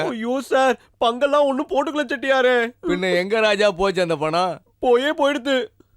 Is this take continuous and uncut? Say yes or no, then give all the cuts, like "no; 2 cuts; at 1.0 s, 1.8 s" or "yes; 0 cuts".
yes; 0 cuts